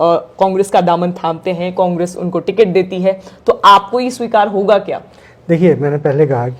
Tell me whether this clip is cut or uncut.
uncut